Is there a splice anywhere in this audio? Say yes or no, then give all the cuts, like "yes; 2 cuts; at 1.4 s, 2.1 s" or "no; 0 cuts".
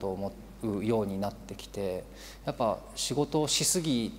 no; 0 cuts